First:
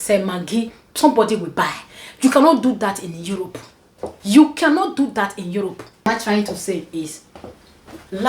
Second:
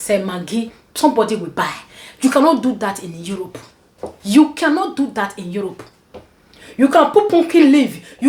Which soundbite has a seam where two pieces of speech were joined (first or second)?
first